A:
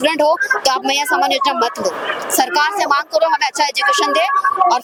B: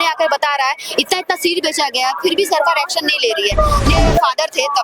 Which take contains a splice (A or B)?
B